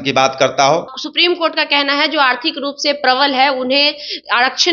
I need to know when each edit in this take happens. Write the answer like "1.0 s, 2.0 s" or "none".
1.0 s